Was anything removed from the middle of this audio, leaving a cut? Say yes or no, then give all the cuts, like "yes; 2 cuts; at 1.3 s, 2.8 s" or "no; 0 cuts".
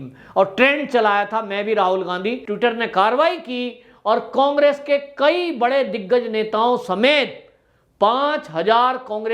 yes; 1 cut; at 2.4 s